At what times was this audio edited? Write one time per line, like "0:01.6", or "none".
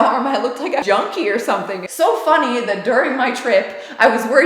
0:00.8
0:01.8